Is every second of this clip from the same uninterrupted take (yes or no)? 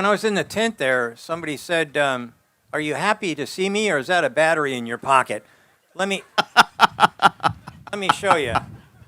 yes